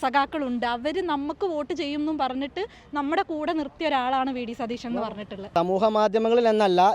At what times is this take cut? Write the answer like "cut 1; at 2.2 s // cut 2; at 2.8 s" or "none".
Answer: cut 1; at 5.5 s

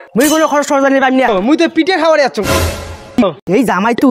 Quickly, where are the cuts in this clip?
cut 1; at 1.3 s // cut 2; at 3.2 s

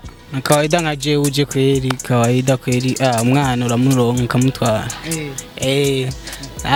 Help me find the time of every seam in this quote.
none

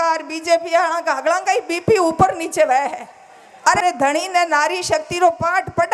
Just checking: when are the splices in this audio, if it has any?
cut 1; at 3.8 s

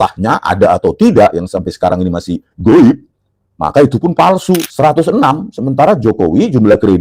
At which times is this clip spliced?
cut 1; at 4.7 s

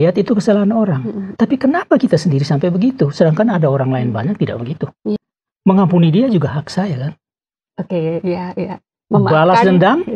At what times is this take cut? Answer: cut 1; at 5.2 s

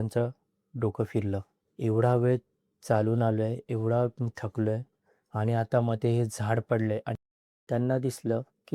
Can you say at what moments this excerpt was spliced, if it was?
cut 1; at 7.4 s

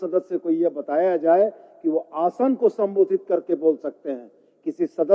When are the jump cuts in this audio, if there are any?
none

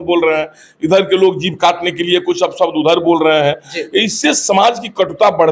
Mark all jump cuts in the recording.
none

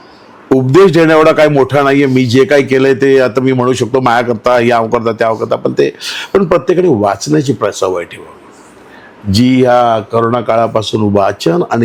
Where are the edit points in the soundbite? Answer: none

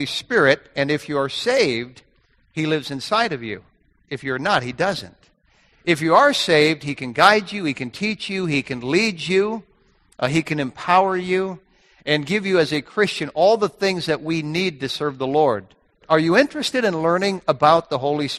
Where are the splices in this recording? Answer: cut 1; at 16.0 s

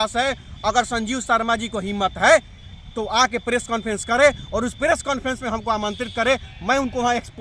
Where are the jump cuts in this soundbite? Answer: none

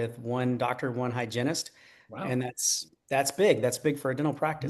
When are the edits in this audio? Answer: none

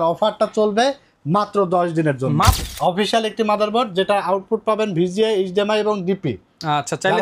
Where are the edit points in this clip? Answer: cut 1; at 2.6 s

